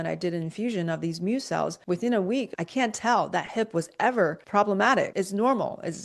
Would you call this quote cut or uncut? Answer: cut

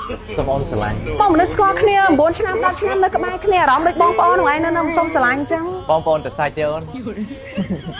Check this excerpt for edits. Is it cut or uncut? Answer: cut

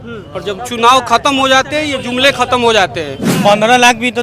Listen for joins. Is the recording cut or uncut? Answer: cut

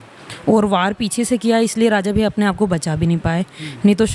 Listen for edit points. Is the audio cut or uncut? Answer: uncut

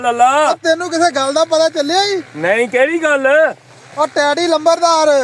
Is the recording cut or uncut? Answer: uncut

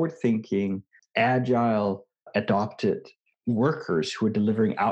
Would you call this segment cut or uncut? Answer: cut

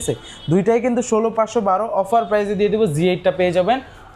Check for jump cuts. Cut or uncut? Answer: uncut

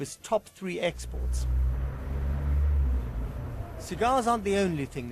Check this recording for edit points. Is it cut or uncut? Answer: cut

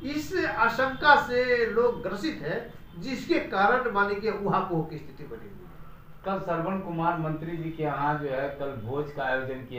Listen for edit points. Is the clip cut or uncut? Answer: uncut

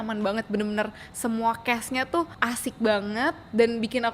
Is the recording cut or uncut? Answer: cut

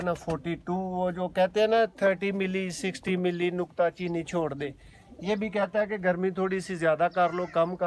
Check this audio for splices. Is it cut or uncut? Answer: uncut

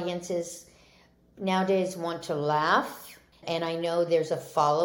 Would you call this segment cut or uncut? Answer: cut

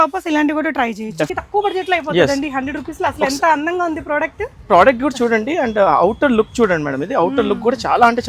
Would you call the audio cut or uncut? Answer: cut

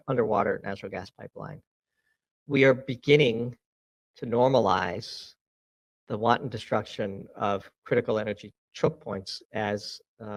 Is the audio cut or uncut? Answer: uncut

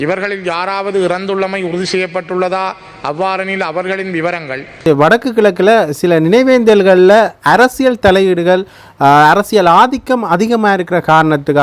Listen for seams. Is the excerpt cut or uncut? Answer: cut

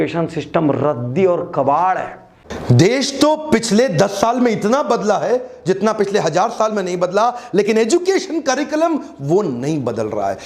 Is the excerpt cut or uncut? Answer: cut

